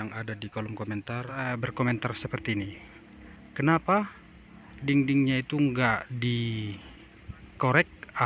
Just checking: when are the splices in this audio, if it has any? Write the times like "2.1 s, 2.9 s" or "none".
1.4 s